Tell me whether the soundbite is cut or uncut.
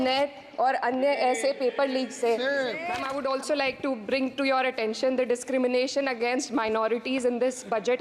cut